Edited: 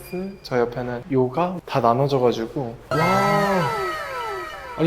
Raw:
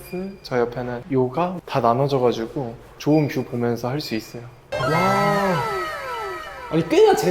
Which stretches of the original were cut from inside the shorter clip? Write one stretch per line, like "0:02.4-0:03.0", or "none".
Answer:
0:02.8-0:04.7